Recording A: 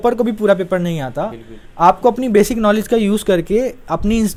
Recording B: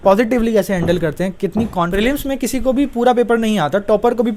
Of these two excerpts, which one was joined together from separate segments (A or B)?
B